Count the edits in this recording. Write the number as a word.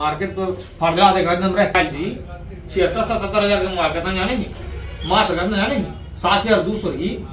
one